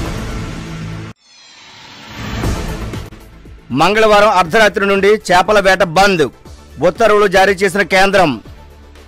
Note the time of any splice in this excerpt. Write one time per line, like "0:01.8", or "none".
0:03.2